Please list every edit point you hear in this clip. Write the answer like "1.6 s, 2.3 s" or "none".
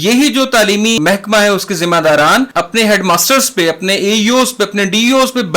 1.0 s, 2.5 s